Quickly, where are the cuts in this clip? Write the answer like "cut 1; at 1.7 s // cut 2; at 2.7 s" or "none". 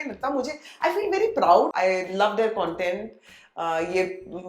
cut 1; at 1.7 s